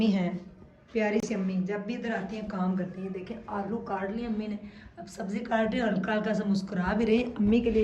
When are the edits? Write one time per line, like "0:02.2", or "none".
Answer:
none